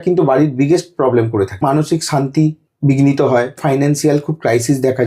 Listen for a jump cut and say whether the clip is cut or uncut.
cut